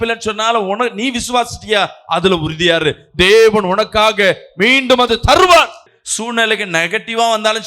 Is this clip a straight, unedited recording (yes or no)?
no